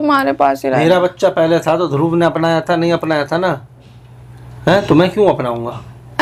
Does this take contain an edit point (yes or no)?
no